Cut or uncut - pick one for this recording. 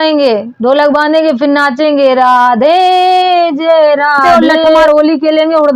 cut